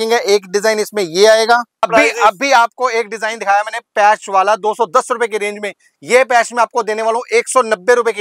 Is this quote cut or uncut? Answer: cut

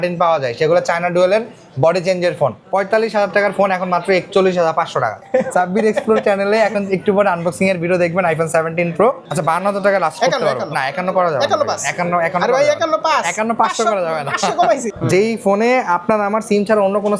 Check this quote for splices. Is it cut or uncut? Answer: cut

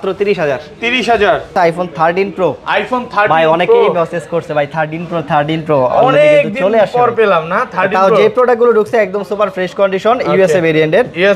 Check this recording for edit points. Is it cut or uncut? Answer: cut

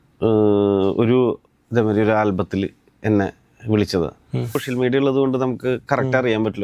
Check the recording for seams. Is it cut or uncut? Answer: cut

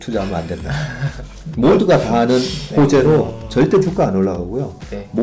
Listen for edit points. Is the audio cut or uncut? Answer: cut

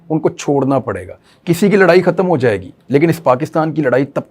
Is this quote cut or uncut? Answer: cut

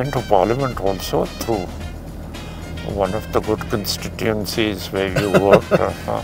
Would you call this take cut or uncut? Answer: uncut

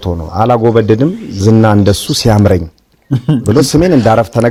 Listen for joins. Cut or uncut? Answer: uncut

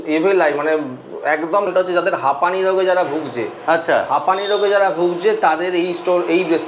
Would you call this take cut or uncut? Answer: cut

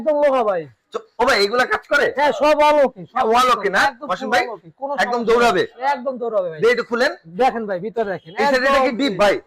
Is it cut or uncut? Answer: uncut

